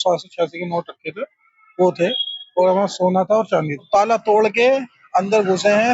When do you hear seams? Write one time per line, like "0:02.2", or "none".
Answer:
0:03.9